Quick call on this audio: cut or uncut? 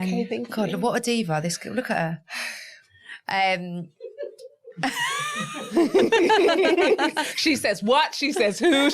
uncut